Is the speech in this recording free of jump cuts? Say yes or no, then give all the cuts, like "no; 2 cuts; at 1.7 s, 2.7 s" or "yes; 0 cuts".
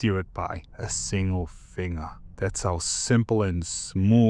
yes; 0 cuts